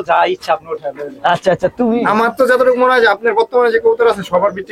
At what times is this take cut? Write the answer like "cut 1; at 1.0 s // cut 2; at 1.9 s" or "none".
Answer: cut 1; at 2.0 s